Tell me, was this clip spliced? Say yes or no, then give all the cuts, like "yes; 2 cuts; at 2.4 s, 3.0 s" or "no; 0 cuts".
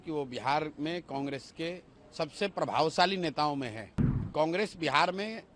yes; 1 cut; at 4.3 s